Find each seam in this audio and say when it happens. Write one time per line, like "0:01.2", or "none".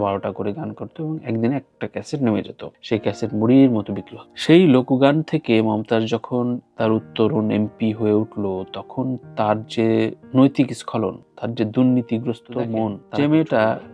0:13.0